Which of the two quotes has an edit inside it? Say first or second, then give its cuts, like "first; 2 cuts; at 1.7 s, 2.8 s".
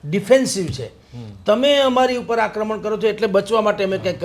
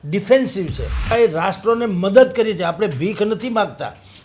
second; 1 cut; at 1.0 s